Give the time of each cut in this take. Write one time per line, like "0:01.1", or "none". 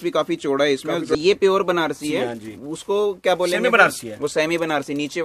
0:01.2

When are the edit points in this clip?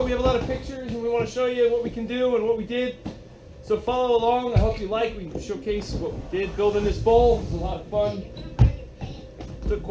none

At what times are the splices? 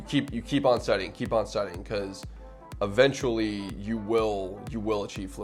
none

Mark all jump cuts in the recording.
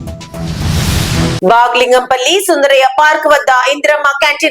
0:01.4

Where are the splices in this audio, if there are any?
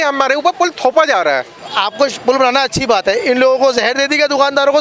0:01.6

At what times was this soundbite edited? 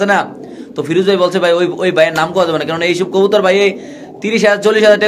none

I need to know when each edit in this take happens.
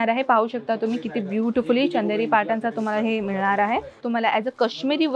0:04.0

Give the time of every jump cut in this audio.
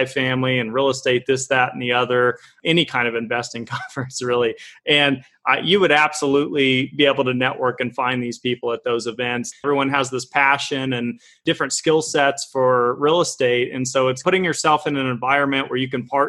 0:09.6
0:14.2

